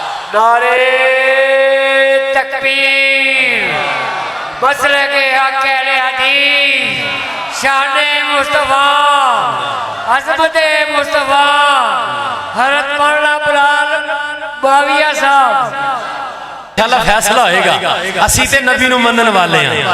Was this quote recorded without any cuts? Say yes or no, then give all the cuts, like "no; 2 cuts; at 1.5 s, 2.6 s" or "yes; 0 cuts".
no; 1 cut; at 16.7 s